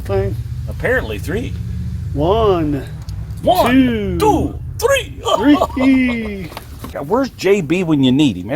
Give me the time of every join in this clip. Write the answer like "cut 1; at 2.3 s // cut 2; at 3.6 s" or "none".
cut 1; at 7.0 s

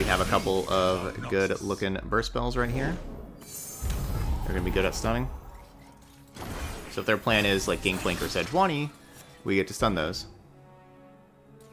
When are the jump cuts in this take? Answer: none

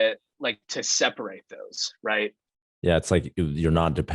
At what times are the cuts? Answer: cut 1; at 2.5 s

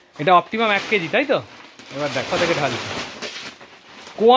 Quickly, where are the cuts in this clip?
cut 1; at 2.3 s

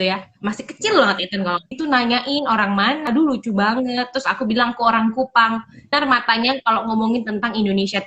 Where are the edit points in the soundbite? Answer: cut 1; at 1.8 s // cut 2; at 3.1 s // cut 3; at 5.9 s

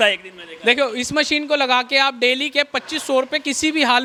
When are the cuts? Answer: none

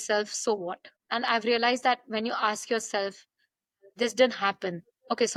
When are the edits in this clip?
none

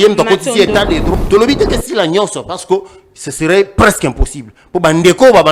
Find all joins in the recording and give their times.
cut 1; at 1.1 s

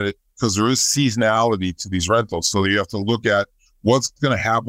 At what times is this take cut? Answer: none

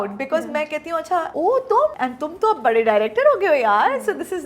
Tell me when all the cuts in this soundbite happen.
cut 1; at 1.3 s // cut 2; at 2.0 s

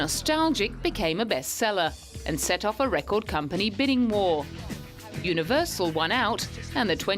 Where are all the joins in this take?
cut 1; at 3.2 s

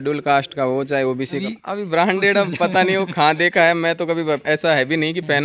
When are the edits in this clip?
cut 1; at 1.4 s

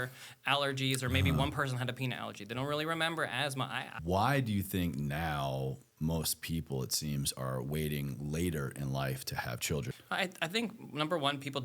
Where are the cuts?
cut 1; at 3.9 s // cut 2; at 9.9 s

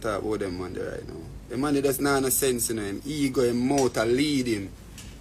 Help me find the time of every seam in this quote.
none

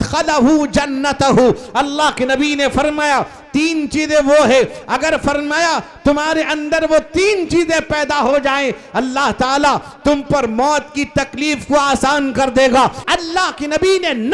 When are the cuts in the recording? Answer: cut 1; at 13.0 s

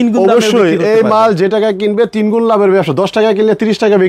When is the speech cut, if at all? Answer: none

